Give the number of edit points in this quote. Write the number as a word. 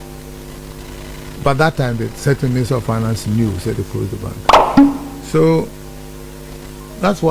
two